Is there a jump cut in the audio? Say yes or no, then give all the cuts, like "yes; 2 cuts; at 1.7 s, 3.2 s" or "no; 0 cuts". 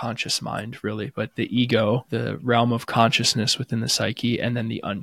yes; 1 cut; at 2.1 s